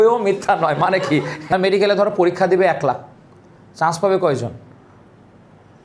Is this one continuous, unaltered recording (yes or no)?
no